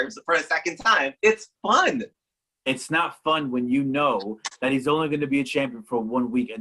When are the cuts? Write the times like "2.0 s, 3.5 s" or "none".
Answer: 1.1 s